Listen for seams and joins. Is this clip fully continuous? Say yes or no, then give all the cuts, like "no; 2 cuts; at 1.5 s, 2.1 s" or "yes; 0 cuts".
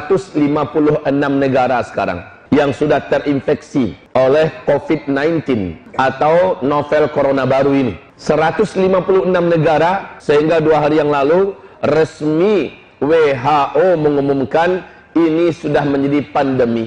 no; 5 cuts; at 2.3 s, 4.0 s, 5.8 s, 8.1 s, 10.1 s